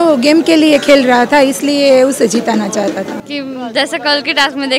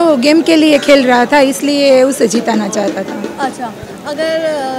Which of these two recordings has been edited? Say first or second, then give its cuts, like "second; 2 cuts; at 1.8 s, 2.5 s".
first; 1 cut; at 3.2 s